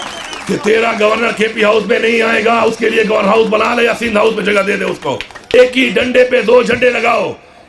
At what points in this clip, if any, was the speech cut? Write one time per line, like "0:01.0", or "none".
0:05.5